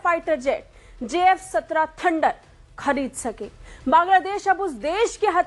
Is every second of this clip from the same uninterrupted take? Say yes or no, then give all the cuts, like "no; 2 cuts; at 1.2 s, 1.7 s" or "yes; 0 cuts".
yes; 0 cuts